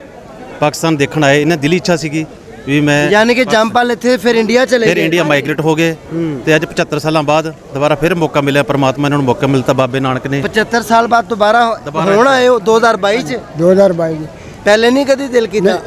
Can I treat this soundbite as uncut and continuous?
yes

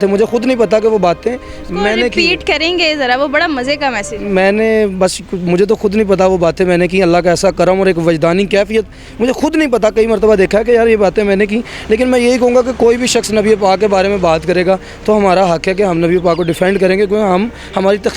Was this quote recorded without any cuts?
yes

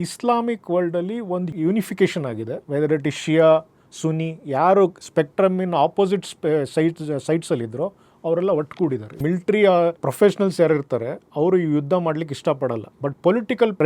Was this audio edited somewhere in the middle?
yes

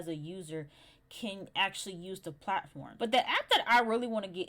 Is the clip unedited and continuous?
no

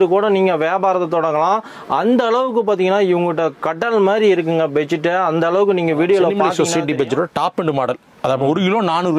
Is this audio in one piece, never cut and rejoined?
no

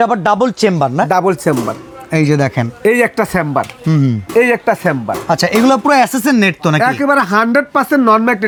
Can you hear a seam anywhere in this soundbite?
no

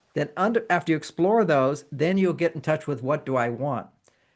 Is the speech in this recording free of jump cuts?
yes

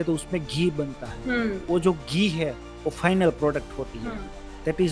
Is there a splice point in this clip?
yes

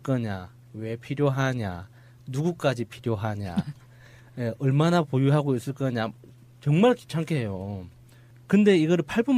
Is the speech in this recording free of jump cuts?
no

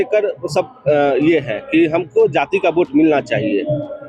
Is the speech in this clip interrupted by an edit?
no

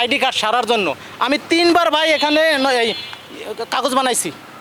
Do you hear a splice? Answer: no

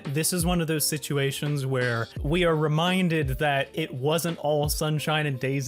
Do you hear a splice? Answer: yes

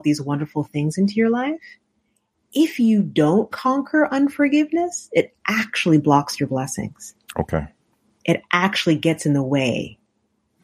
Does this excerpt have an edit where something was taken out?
no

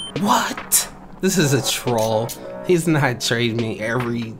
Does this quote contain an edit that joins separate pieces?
yes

